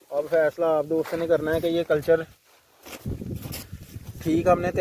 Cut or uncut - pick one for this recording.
uncut